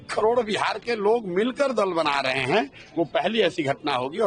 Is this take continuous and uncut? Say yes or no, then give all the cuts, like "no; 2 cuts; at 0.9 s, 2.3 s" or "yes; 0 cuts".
yes; 0 cuts